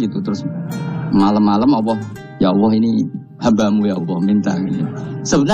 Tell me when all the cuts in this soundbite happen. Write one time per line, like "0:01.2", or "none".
none